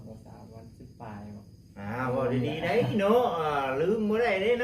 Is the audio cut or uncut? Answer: uncut